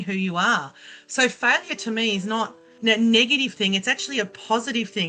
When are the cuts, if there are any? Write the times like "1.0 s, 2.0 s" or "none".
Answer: 2.6 s